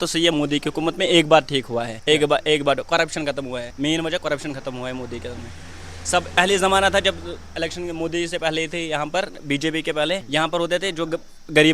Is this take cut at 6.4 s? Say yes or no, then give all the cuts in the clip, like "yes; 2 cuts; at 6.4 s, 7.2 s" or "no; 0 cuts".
yes; 4 cuts; at 1.9 s, 3.7 s, 6.4 s, 10.2 s